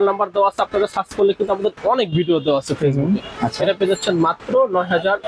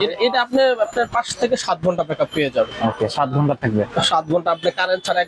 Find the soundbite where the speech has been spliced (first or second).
first